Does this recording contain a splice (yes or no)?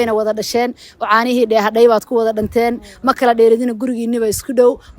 no